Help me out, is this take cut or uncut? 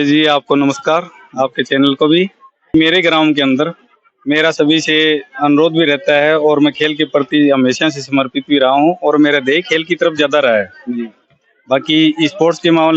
cut